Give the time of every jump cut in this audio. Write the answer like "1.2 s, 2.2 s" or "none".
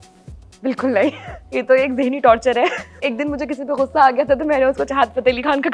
1.4 s, 3.0 s